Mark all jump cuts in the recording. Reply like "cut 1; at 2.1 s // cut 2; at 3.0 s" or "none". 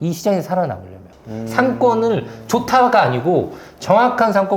cut 1; at 1.0 s